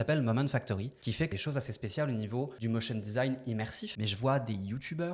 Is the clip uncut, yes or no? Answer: no